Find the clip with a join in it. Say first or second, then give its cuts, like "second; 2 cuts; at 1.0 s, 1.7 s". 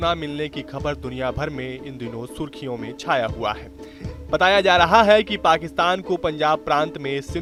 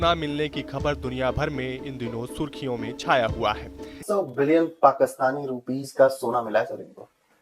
second; 1 cut; at 4.0 s